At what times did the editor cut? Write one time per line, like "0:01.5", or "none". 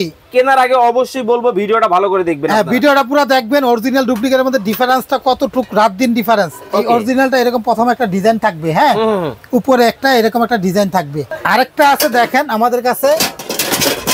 0:11.2